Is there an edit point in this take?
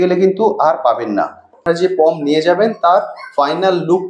yes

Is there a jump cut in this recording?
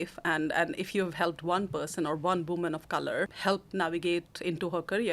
yes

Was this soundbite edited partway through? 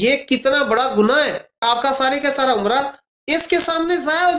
yes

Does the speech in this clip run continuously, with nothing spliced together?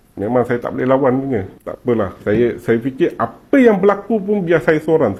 yes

